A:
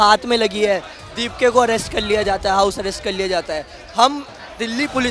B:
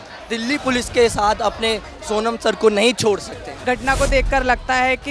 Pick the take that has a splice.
B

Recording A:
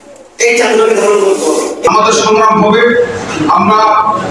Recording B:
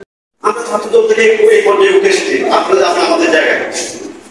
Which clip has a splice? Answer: A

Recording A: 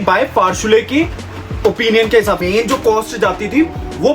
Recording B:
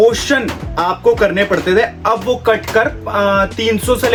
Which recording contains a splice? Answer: A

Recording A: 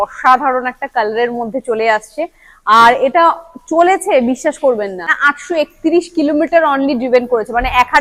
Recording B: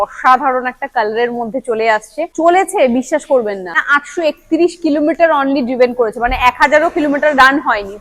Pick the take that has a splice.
B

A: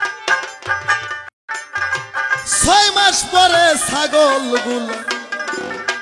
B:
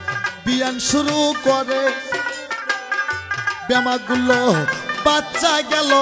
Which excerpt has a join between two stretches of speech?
A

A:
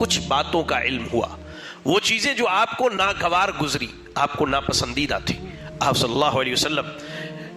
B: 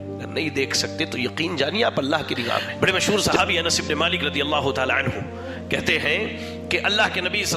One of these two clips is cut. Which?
B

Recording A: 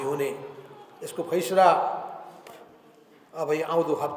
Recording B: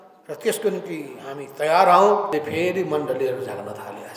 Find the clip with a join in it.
B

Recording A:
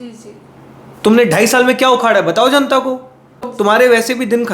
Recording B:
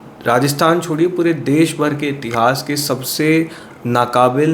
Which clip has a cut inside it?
A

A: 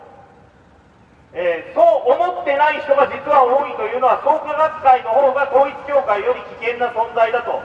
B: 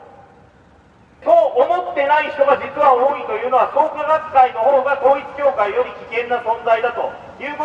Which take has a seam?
B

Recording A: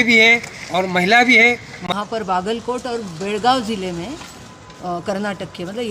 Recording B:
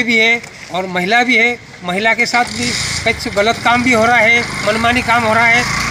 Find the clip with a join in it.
A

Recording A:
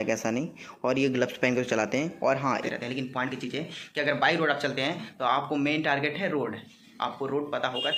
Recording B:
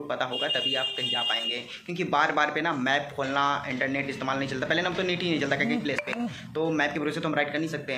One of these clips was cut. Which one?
A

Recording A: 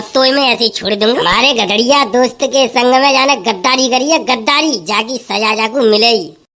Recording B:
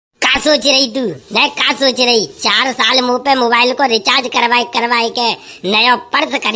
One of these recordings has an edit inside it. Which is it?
A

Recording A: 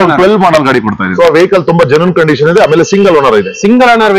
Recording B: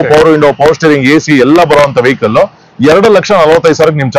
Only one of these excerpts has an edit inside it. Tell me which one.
A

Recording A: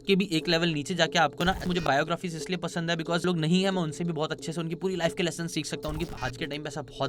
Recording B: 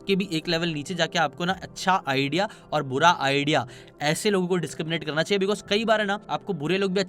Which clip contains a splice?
A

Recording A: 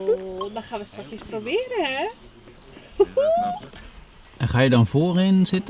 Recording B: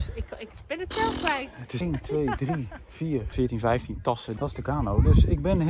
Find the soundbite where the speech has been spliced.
B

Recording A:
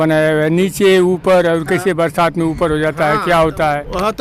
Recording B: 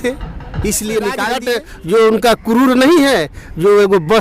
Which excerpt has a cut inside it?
B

